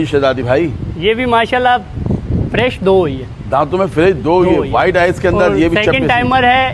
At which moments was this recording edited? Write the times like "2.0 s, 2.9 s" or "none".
none